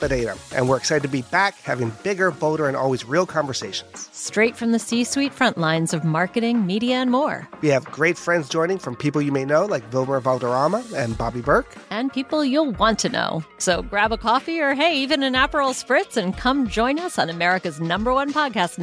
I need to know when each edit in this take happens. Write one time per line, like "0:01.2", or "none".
none

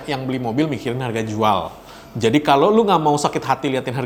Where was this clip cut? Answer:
none

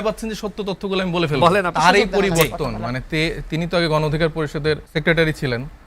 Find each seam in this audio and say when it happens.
0:01.7
0:04.8

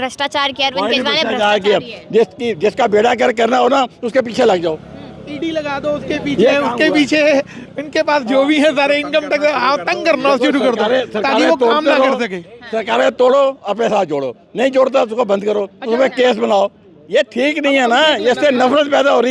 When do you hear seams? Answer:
none

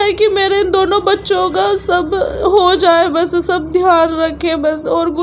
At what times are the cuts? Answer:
none

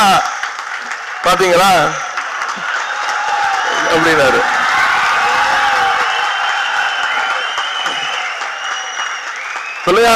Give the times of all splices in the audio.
none

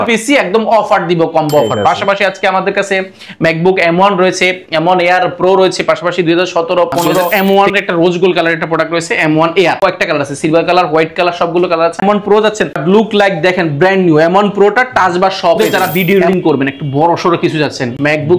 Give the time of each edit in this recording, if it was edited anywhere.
0:07.3
0:09.8
0:12.0
0:15.6

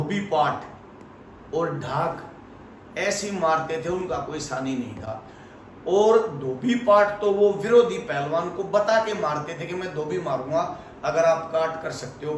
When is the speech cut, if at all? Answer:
none

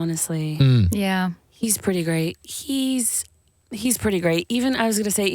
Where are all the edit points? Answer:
none

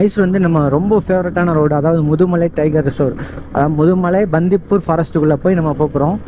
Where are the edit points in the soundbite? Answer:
none

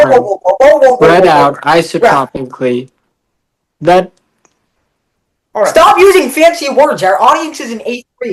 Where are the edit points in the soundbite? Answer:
none

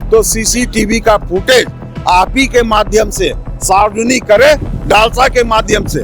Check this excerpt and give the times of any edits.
0:04.7

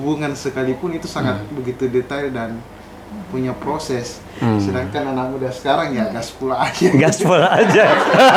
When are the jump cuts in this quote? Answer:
none

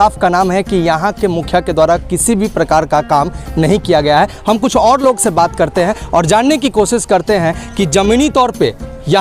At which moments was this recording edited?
none

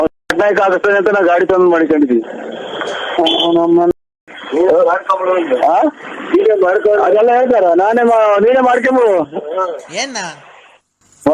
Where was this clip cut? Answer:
none

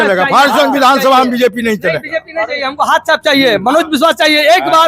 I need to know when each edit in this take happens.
none

